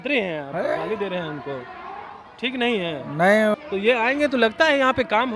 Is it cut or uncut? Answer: cut